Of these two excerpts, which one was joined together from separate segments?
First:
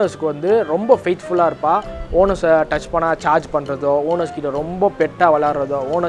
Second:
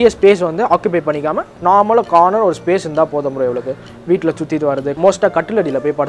second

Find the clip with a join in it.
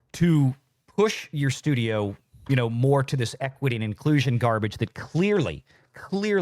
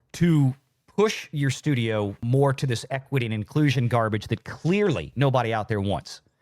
second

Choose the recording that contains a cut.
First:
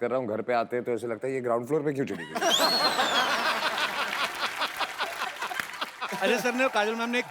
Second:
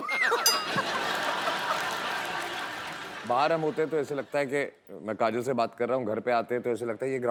first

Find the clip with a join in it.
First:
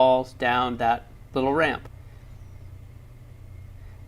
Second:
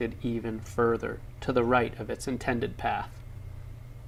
first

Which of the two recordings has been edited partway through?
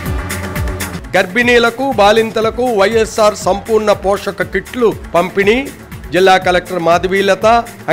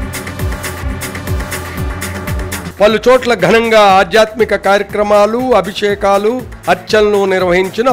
first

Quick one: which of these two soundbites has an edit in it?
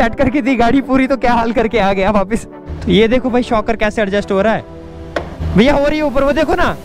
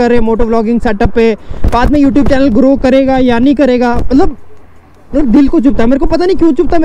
first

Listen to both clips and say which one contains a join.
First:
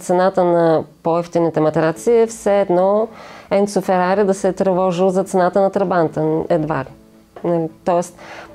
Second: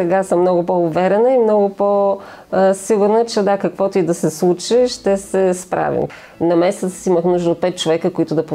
second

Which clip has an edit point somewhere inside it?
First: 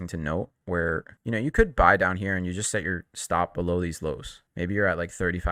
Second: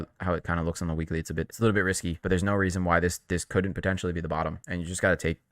second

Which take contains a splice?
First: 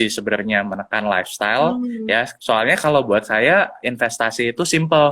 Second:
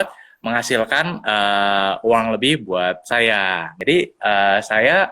second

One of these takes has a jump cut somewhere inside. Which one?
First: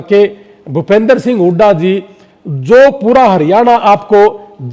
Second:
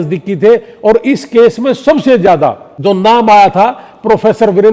second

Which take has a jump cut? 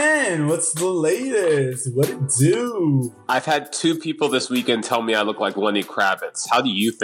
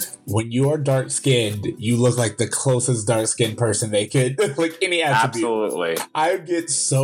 second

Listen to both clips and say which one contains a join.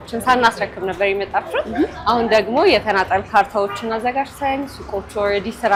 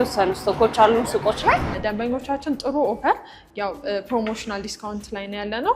second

